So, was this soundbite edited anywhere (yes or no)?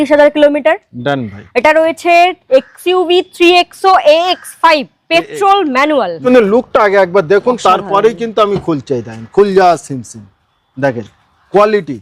yes